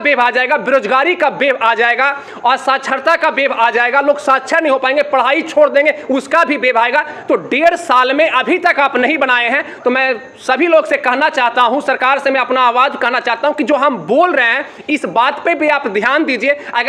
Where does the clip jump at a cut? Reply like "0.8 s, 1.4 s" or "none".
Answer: none